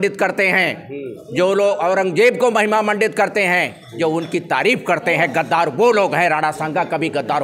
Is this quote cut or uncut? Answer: uncut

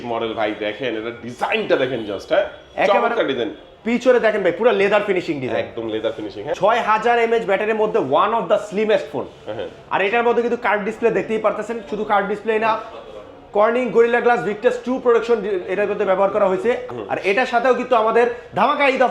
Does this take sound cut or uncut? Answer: cut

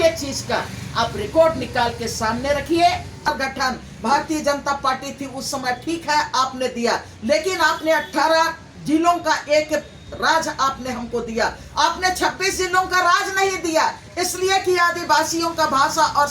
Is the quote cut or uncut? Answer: cut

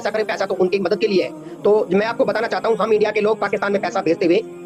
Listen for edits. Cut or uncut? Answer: uncut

